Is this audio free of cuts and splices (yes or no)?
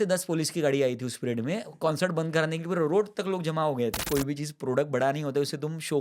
no